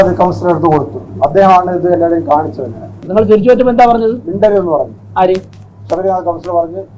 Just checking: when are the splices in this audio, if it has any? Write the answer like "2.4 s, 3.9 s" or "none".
3.0 s